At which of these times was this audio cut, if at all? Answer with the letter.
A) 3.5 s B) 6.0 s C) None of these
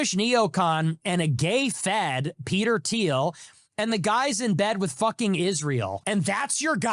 B